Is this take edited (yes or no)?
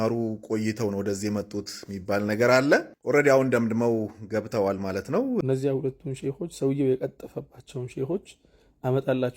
yes